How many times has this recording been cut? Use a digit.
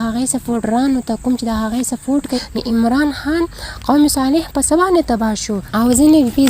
2